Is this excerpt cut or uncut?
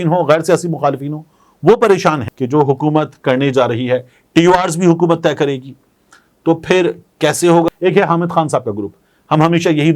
cut